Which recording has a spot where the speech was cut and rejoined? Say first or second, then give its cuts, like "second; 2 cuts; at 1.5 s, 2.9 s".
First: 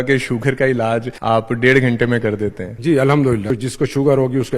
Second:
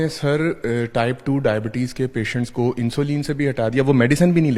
first; 3 cuts; at 1.1 s, 2.7 s, 3.5 s